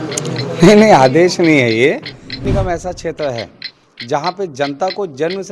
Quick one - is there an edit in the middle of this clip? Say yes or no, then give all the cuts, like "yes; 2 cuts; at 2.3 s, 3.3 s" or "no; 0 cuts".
yes; 1 cut; at 2.5 s